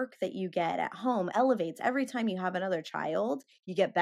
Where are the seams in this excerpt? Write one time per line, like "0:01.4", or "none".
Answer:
0:01.3

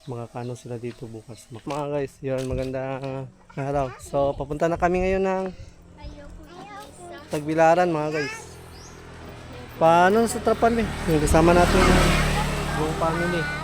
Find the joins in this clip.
0:01.6

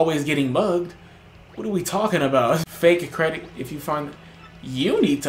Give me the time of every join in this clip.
0:02.7

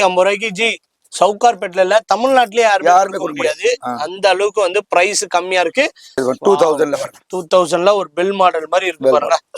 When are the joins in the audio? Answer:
0:06.1

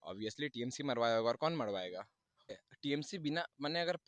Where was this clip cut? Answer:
0:02.5

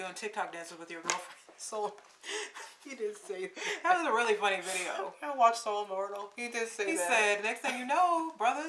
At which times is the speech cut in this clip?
none

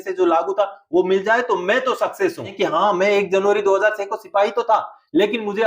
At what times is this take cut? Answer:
0:02.5

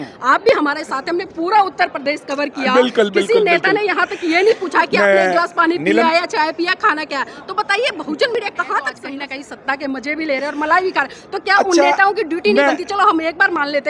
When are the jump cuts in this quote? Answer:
0:09.0

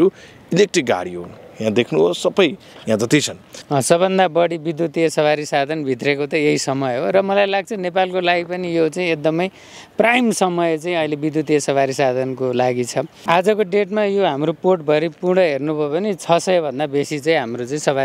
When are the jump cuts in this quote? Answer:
0:03.5
0:13.2

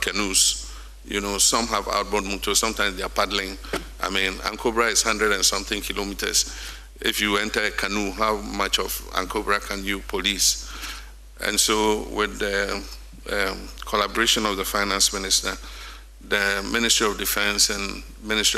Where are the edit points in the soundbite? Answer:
none

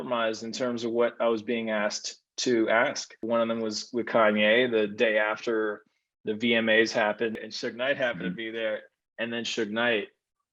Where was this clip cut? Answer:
0:03.2
0:07.3

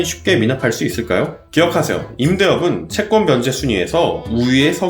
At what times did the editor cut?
0:01.4

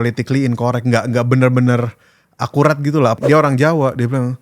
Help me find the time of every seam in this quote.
0:03.2

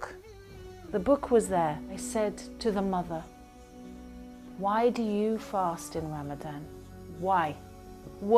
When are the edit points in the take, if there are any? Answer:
0:01.9

